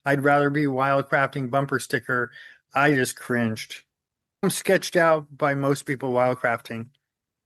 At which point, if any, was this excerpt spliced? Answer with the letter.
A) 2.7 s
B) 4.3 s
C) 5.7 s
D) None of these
B